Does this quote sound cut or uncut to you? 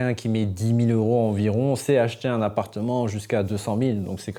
uncut